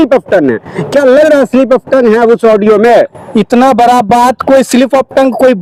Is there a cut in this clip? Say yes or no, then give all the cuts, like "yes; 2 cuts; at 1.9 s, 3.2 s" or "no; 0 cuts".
no; 0 cuts